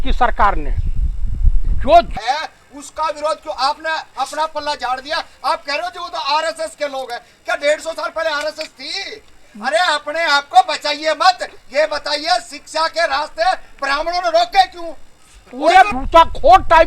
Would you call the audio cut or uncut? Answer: cut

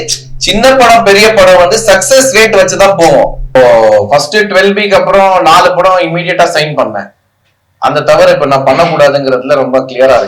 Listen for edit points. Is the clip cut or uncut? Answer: cut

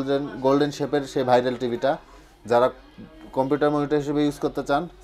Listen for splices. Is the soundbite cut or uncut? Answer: uncut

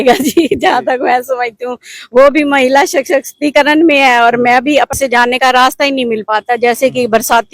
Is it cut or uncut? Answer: cut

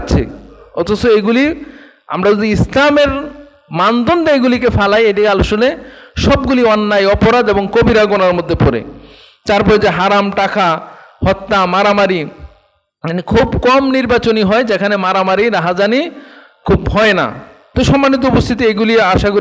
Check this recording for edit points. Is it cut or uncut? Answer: uncut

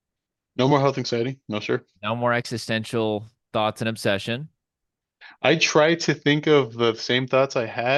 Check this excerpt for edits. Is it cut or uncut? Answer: uncut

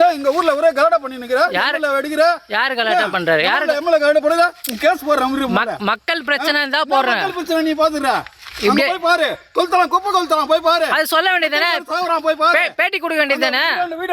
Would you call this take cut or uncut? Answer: uncut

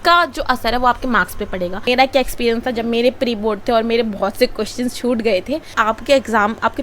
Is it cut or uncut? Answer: cut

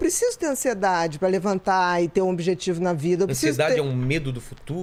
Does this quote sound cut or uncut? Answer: uncut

